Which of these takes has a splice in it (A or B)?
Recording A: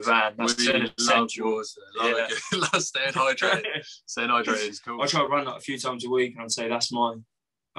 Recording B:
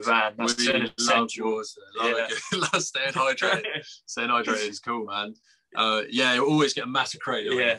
A